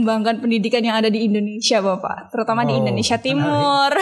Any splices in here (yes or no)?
no